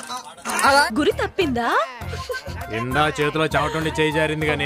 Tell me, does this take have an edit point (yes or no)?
yes